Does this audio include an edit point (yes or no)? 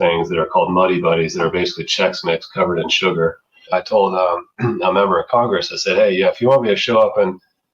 yes